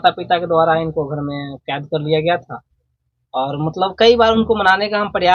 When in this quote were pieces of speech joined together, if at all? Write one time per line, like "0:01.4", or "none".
none